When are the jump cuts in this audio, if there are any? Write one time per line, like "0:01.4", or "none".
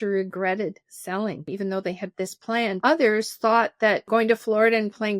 0:01.5
0:02.8
0:04.1